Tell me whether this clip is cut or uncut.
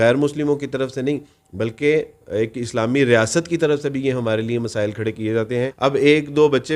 cut